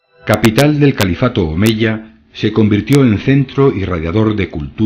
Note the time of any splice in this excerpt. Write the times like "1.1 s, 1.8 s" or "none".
none